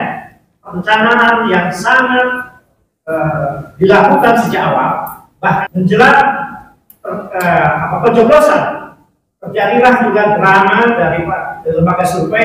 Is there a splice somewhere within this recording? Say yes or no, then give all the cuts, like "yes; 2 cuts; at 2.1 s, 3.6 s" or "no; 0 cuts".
yes; 1 cut; at 5.6 s